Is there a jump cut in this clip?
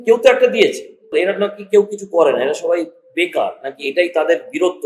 yes; 1 cut; at 1.1 s

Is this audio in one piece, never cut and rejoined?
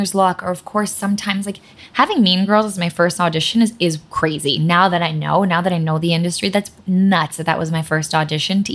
no; 1 cut; at 1.7 s

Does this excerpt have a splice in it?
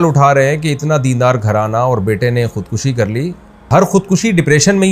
yes; 1 cut; at 3.7 s

